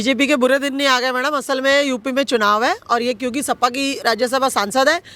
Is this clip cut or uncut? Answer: uncut